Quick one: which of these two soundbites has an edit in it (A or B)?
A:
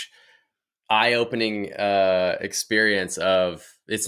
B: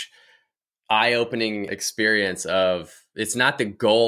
B